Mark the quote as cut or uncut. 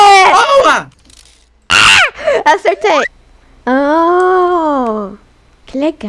cut